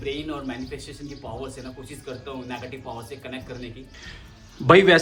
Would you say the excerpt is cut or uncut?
uncut